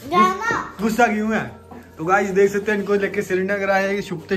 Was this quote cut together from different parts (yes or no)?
no